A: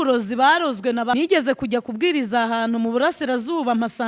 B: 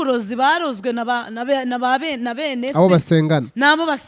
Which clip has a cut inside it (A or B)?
A